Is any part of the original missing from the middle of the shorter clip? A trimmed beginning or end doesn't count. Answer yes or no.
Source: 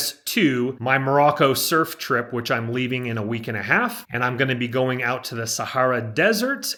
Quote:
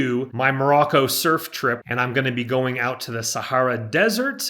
yes